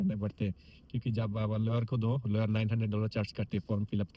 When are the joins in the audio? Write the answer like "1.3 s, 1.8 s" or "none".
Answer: none